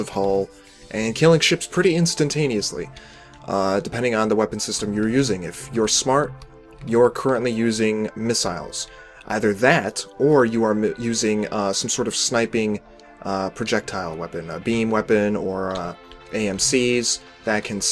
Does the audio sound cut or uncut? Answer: cut